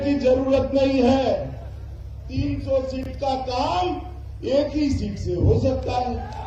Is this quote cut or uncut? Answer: uncut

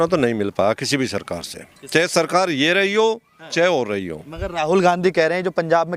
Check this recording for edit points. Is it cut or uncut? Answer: uncut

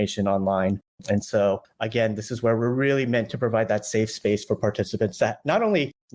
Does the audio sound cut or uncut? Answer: uncut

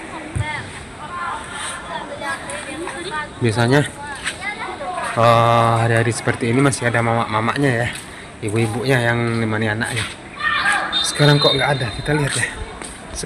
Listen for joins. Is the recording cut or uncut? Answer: uncut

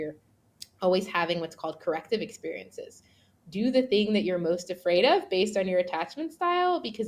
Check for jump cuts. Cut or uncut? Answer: cut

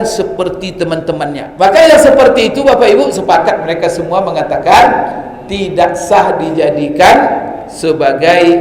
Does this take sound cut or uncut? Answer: cut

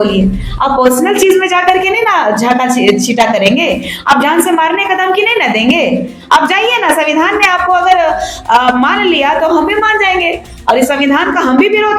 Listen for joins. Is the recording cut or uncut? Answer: uncut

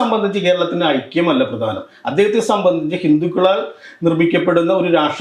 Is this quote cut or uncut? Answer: uncut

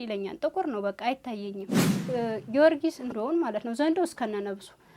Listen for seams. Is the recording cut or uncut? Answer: cut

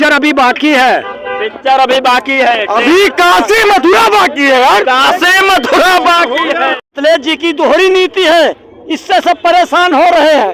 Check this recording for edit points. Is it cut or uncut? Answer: cut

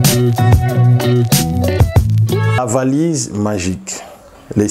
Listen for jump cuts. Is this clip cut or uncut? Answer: cut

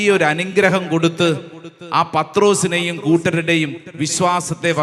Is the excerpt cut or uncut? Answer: uncut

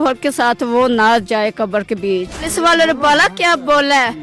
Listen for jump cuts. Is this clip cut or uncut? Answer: cut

